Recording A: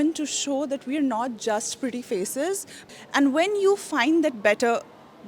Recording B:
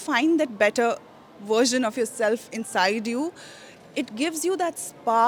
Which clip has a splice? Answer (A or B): A